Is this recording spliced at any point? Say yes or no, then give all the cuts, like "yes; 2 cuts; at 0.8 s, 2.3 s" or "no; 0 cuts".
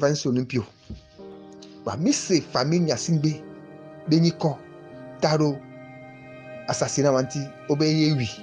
no; 0 cuts